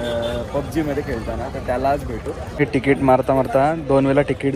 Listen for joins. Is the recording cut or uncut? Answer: cut